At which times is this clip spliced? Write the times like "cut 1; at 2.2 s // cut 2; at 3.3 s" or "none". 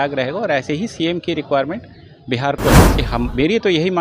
cut 1; at 2.9 s